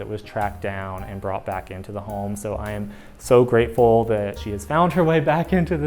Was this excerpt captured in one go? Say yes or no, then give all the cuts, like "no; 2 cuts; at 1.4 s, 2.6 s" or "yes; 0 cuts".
yes; 0 cuts